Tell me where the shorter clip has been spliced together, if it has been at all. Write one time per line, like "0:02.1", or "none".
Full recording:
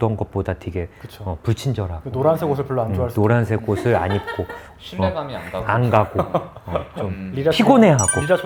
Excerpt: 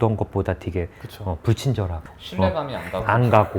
0:02.0